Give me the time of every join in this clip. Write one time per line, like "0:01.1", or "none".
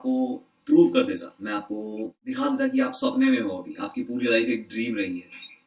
0:02.2